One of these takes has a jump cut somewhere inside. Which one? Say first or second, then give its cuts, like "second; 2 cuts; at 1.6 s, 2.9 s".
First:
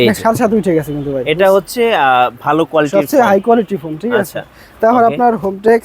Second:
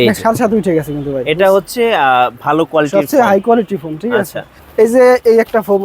second; 1 cut; at 4.6 s